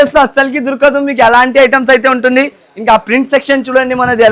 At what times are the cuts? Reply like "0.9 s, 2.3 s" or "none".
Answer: none